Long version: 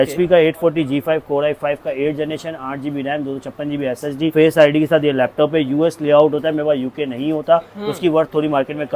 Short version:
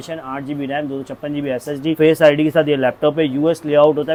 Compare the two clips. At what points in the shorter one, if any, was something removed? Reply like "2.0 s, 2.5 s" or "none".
none